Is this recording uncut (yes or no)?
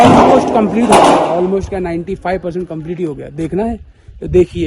yes